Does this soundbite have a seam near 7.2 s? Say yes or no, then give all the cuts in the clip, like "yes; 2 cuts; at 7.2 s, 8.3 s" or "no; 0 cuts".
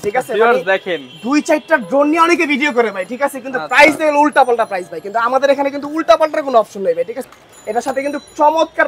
yes; 1 cut; at 7.2 s